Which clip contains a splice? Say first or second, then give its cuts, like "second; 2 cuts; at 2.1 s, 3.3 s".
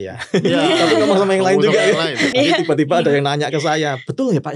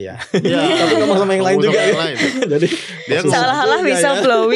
first; 1 cut; at 2.3 s